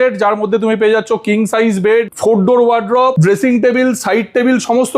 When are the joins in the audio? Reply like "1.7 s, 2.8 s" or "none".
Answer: 2.1 s, 3.2 s